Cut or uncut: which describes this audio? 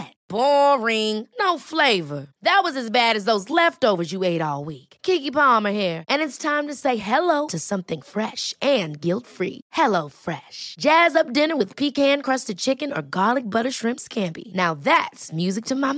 uncut